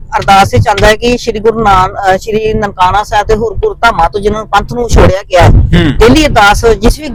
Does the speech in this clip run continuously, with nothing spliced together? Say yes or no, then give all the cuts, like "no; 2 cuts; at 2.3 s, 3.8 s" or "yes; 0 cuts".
yes; 0 cuts